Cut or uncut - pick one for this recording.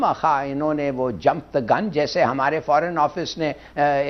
uncut